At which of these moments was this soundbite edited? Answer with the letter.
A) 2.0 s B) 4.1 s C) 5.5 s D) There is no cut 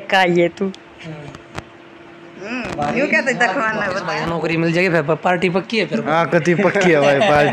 B